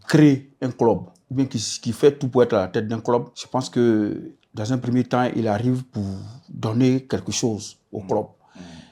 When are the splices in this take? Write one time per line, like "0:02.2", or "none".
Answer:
0:03.4